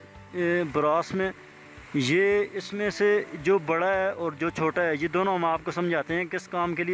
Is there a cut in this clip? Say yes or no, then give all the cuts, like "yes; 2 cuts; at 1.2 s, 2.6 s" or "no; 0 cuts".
no; 0 cuts